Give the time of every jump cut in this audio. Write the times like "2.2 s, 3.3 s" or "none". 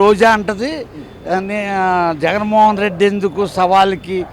none